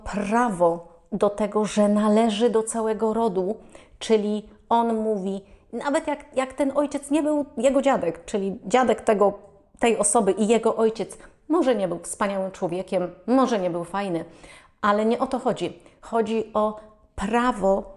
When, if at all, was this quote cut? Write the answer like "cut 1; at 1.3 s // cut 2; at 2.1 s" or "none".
none